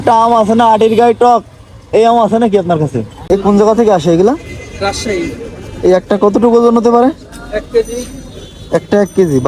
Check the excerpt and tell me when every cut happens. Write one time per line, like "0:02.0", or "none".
0:03.2